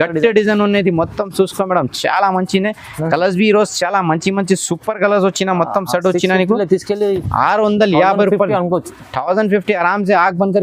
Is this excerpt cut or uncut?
uncut